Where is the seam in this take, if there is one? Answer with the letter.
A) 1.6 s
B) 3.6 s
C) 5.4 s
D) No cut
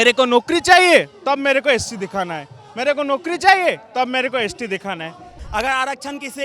C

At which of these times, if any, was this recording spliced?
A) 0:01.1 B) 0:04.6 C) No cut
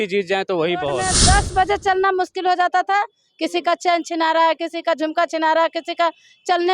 A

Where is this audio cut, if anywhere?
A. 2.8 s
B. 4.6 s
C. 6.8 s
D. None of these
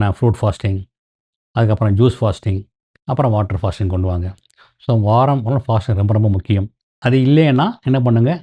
C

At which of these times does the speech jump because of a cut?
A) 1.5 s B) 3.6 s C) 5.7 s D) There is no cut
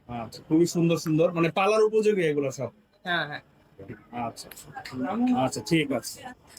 D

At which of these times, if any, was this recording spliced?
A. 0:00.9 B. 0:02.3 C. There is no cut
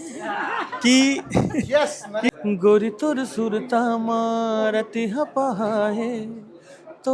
B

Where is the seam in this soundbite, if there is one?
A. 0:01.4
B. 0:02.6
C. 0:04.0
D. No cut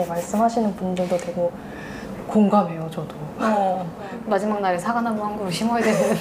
C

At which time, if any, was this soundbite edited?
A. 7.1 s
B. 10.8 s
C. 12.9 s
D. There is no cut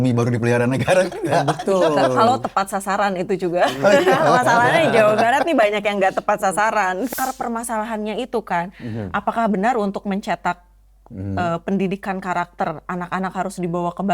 A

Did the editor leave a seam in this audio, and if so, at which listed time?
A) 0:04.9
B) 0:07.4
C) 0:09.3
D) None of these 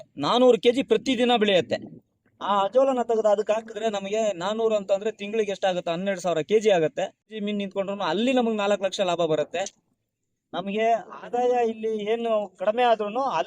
B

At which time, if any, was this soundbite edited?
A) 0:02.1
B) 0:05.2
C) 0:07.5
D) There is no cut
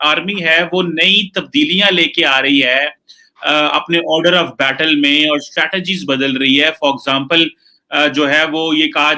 D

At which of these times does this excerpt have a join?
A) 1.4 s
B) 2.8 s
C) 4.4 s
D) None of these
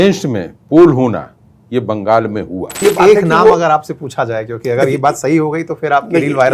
B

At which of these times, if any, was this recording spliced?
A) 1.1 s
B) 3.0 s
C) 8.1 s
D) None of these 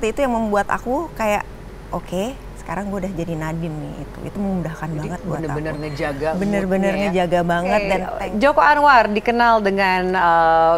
C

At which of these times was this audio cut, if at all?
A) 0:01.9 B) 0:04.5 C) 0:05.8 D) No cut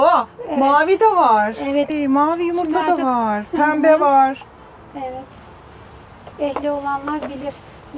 D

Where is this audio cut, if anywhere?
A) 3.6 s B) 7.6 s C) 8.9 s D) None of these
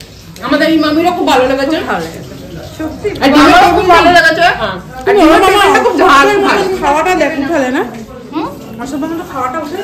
D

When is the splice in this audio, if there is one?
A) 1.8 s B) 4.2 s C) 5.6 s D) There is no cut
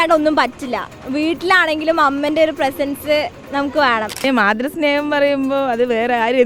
B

